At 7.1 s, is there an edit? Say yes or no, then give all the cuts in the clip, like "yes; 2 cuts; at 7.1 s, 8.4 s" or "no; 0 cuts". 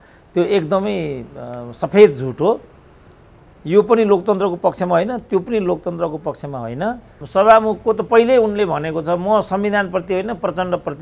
yes; 1 cut; at 7.1 s